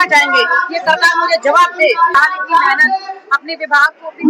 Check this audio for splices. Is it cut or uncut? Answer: cut